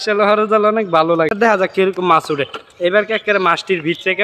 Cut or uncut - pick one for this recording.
cut